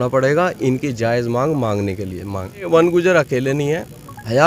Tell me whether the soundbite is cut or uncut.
cut